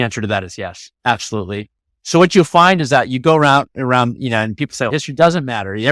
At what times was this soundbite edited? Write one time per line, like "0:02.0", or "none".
0:04.9

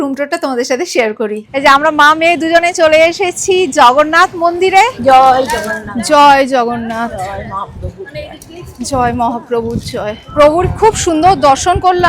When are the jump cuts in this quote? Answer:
0:01.4
0:04.9
0:10.2

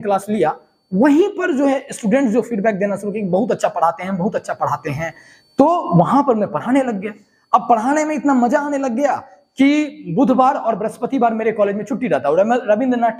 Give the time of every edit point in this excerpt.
none

